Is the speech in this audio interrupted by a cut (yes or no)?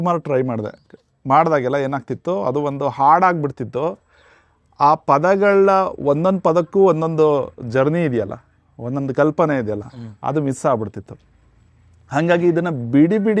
no